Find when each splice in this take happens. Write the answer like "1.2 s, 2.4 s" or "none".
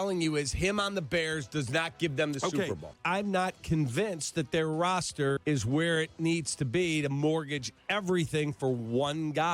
2.9 s, 5.4 s